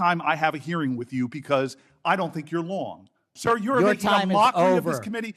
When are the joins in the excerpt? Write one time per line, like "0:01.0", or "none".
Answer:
0:03.3